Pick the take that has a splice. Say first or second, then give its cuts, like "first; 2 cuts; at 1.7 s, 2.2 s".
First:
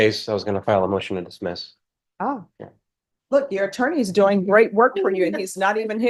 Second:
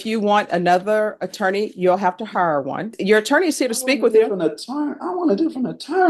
second; 1 cut; at 2.9 s